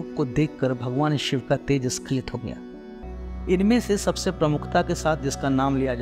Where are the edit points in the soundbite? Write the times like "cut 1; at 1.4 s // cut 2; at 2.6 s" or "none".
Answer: cut 1; at 3.0 s